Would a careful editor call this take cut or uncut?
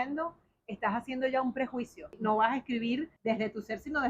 cut